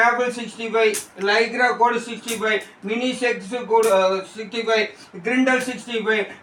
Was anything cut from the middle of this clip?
no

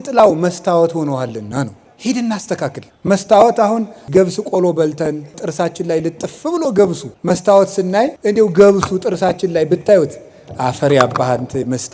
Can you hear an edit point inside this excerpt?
yes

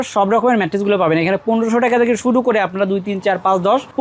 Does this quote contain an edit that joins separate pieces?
no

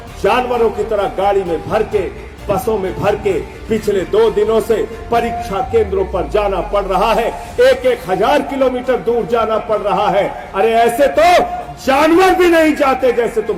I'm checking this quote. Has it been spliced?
no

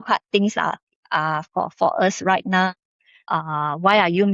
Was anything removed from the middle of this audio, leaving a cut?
yes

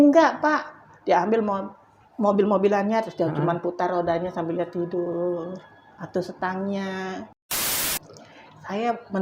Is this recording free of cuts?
no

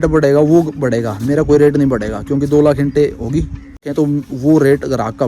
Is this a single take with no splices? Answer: no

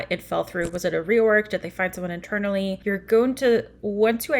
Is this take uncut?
no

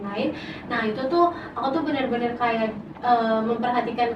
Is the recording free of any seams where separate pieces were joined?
yes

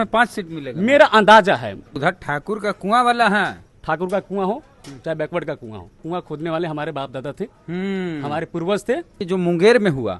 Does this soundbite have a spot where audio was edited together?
yes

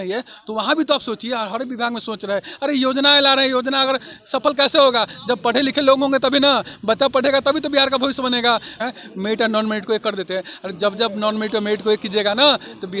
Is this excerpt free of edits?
no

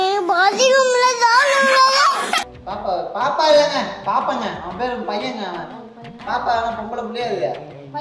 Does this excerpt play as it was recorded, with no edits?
no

